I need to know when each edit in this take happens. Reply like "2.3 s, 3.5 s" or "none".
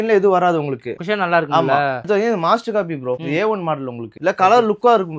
2.0 s, 4.2 s